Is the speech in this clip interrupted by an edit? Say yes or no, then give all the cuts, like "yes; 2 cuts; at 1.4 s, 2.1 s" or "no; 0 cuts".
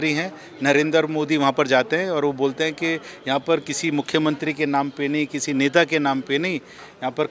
no; 0 cuts